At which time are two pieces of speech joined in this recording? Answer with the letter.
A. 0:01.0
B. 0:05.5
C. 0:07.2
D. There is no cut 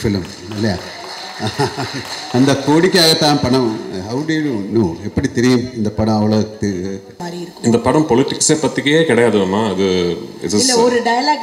C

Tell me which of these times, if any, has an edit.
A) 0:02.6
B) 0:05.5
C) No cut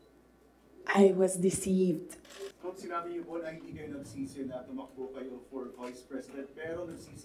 A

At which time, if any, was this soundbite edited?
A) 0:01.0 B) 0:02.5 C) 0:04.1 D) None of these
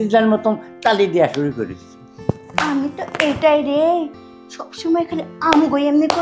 D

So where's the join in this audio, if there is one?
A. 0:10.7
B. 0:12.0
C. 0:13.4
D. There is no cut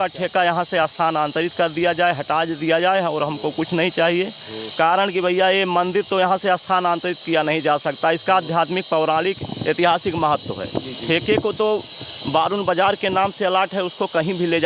D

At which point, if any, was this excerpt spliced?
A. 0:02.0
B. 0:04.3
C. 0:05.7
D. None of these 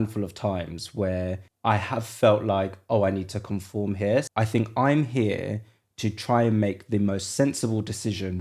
B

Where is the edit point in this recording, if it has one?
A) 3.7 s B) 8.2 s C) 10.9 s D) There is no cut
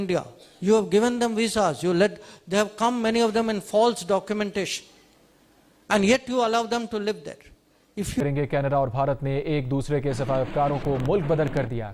B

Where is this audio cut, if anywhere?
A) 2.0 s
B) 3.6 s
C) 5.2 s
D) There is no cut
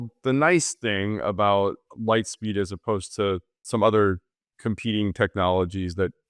B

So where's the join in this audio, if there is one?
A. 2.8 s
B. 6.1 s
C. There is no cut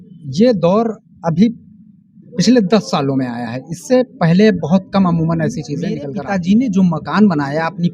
B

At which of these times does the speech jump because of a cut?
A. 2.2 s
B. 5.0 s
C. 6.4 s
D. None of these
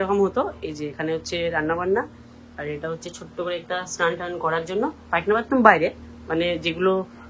D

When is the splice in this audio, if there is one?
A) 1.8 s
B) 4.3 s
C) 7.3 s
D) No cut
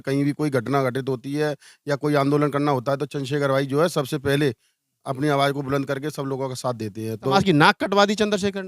C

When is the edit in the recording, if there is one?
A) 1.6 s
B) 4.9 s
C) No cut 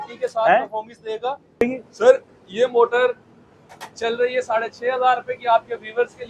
A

